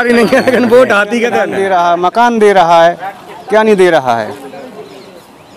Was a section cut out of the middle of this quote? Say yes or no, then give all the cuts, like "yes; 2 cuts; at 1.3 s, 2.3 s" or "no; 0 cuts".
yes; 1 cut; at 1.5 s